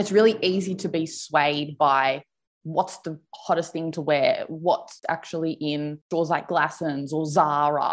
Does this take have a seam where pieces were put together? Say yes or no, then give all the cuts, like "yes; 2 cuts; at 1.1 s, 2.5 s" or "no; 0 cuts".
no; 0 cuts